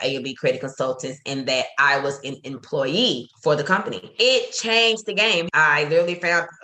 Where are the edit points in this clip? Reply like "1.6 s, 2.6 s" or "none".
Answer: 5.5 s